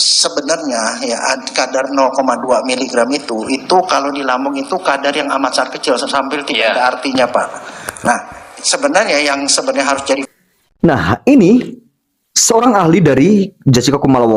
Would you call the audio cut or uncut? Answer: uncut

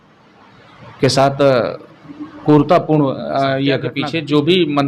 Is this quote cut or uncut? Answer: cut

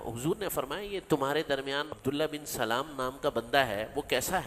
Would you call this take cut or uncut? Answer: cut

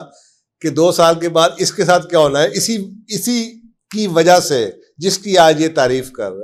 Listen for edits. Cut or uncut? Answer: uncut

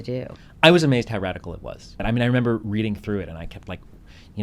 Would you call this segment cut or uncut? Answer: cut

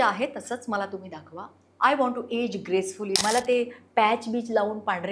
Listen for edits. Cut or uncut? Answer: cut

